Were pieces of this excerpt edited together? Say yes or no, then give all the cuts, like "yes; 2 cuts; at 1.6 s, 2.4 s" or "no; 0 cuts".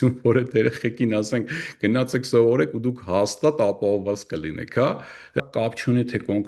yes; 1 cut; at 5.4 s